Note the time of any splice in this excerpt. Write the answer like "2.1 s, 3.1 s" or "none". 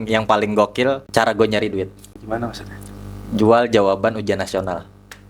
1.0 s, 2.1 s